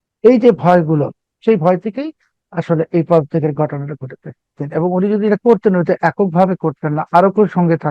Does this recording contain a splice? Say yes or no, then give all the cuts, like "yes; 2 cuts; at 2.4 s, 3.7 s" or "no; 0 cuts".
yes; 2 cuts; at 1.3 s, 4.6 s